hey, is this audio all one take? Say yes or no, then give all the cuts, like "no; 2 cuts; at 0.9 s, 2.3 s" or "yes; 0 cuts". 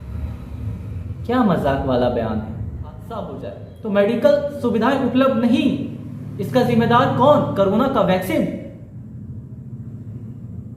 no; 1 cut; at 3.4 s